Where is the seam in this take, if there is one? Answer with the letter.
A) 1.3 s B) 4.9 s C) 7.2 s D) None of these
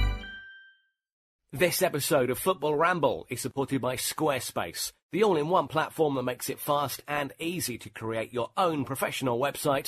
A